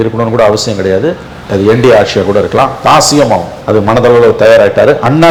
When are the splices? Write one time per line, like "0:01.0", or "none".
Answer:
none